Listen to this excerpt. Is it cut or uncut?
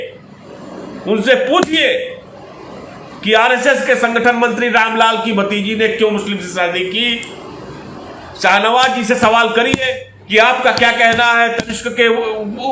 uncut